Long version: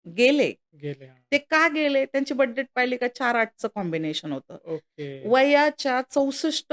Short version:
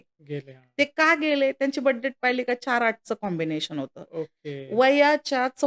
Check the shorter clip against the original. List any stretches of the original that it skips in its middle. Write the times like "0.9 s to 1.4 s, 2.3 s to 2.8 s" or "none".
none